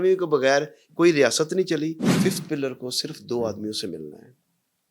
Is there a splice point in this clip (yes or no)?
yes